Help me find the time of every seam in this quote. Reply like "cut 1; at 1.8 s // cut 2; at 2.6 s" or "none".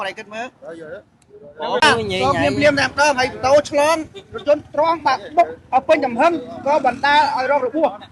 cut 1; at 1.8 s